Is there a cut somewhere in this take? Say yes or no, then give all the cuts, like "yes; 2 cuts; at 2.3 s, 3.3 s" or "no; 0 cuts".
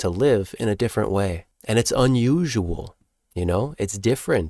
yes; 1 cut; at 1.5 s